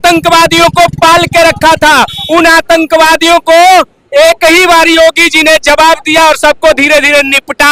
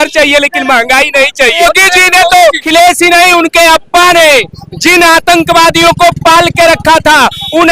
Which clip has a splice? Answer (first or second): second